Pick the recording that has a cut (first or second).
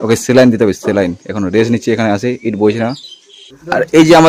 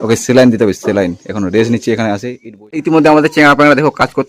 second